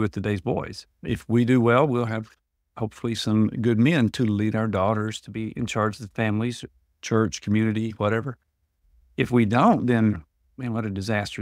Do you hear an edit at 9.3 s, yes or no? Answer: no